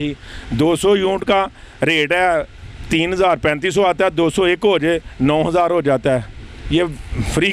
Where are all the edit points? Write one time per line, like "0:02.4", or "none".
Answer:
none